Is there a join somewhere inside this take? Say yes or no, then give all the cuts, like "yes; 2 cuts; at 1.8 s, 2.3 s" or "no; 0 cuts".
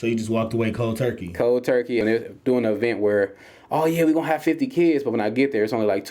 yes; 1 cut; at 2.0 s